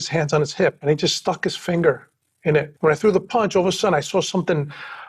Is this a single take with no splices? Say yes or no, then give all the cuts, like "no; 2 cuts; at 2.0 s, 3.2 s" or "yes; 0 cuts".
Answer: no; 2 cuts; at 0.8 s, 2.7 s